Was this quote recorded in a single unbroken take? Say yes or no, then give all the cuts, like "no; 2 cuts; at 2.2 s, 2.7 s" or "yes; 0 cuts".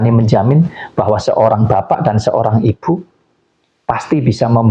yes; 0 cuts